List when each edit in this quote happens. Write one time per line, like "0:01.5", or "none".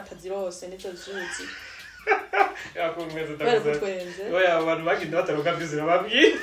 none